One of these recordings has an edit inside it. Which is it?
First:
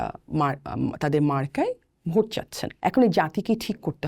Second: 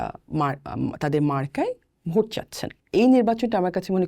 first; 1 cut; at 2.6 s

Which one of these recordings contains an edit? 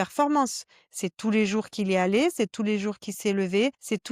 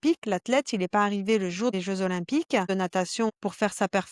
second; 2 cuts; at 1.7 s, 3.1 s

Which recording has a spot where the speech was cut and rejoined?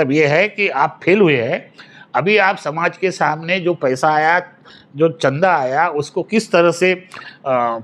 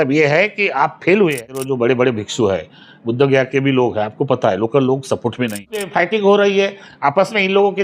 second; 2 cuts; at 1.6 s, 5.8 s

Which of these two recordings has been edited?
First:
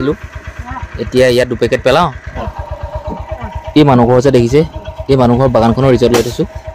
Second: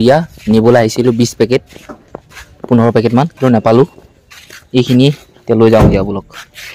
first; 1 cut; at 2.3 s

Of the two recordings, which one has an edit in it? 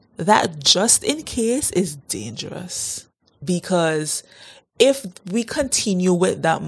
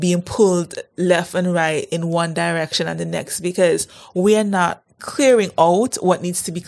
first; 1 cut; at 3.3 s

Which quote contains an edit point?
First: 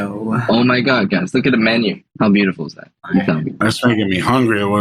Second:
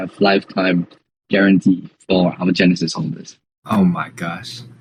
first; 2 cuts; at 2.0 s, 3.6 s

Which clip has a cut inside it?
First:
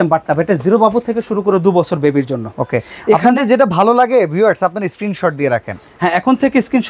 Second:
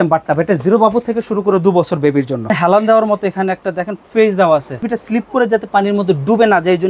second; 2 cuts; at 2.5 s, 4.9 s

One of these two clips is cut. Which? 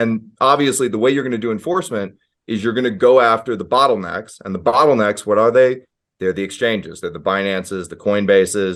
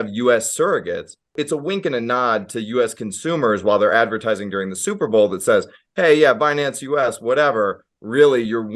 second; 1 cut; at 1.4 s

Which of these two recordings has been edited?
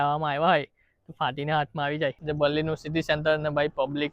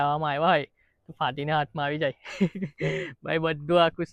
first; 1 cut; at 2.2 s

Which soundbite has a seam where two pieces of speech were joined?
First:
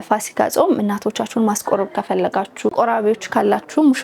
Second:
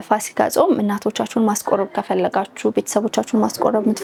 first; 1 cut; at 2.7 s

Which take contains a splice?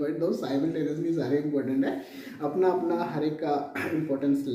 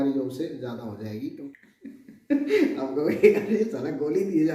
second; 1 cut; at 1.4 s

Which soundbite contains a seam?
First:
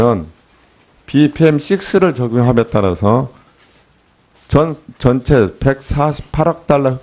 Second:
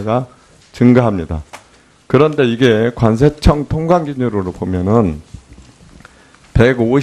first; 1 cut; at 6.0 s

